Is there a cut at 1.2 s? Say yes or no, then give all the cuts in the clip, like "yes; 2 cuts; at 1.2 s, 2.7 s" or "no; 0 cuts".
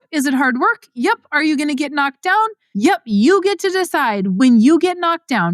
no; 2 cuts; at 2.6 s, 4.4 s